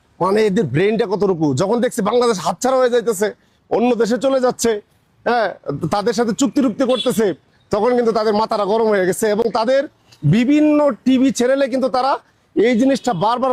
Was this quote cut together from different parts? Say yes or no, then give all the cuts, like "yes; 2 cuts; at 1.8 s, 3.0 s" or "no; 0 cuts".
no; 0 cuts